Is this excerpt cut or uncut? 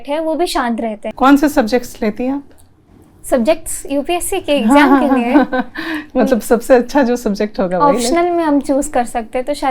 cut